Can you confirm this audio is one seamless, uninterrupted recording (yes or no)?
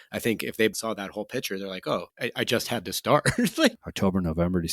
no